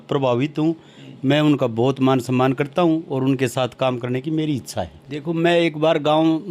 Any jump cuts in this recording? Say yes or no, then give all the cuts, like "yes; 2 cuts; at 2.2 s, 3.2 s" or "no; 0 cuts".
yes; 1 cut; at 5.1 s